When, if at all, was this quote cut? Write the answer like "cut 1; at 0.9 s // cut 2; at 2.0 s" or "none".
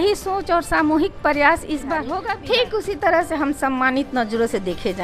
cut 1; at 2.0 s